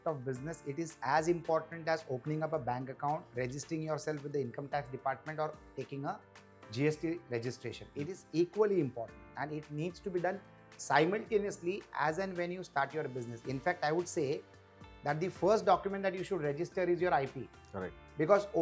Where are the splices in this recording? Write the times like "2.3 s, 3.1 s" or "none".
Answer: none